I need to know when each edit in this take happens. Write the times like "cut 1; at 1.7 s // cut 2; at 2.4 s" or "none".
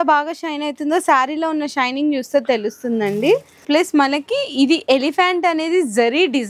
cut 1; at 3.6 s